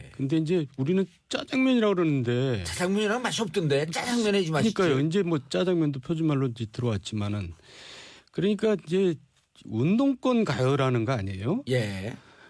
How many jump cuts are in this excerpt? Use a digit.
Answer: 1